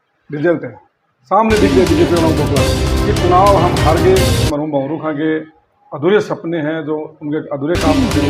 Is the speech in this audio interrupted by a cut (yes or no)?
yes